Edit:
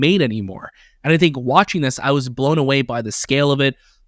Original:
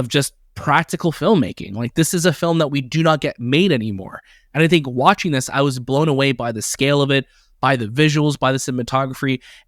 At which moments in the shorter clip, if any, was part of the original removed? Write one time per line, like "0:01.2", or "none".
none

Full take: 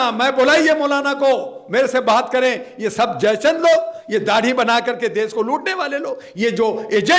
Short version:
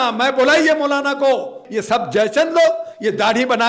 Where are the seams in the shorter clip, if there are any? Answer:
0:01.6

